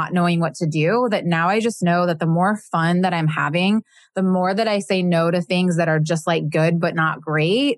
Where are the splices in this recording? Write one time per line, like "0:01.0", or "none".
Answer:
none